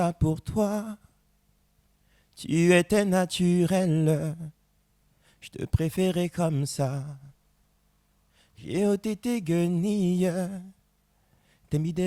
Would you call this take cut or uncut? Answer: uncut